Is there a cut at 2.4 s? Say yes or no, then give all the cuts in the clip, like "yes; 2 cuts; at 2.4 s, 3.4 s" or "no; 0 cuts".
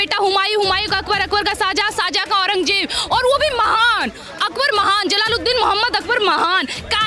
no; 0 cuts